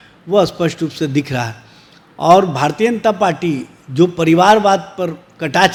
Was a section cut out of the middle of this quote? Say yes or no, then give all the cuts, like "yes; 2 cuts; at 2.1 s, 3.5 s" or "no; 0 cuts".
no; 0 cuts